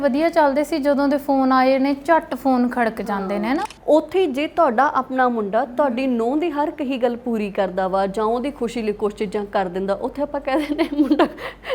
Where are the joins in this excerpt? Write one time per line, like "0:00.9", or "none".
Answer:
0:03.7